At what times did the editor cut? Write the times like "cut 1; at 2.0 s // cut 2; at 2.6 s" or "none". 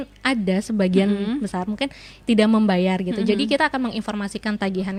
none